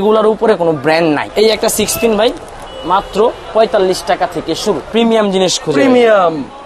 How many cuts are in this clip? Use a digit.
2